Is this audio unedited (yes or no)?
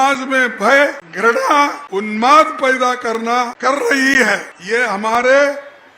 no